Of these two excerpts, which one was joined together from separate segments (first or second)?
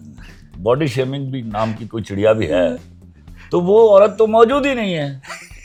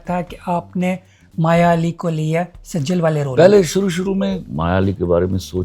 second